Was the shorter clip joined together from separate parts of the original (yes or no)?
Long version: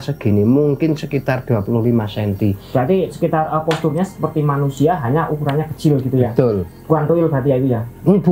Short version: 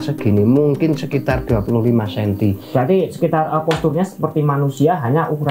no